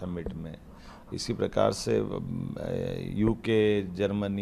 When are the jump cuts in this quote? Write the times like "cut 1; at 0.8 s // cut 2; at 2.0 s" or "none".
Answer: none